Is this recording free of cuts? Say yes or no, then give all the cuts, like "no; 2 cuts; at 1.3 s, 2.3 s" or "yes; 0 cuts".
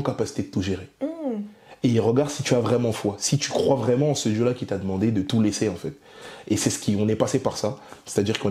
yes; 0 cuts